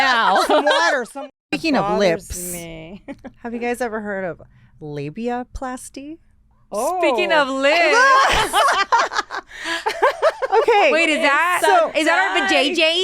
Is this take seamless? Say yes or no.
no